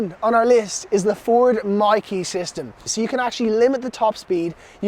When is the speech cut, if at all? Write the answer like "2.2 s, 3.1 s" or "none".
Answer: 2.9 s